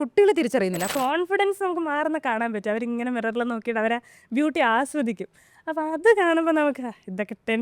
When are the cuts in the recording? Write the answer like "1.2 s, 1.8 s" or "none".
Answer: 0.9 s

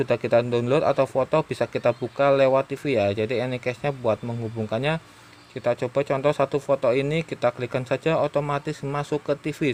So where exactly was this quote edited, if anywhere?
none

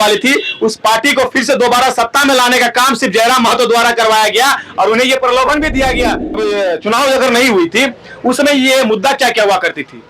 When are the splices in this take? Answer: 6.4 s

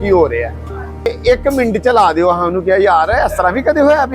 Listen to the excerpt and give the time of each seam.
1.1 s

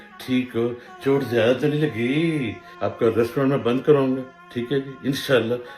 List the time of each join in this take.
2.7 s

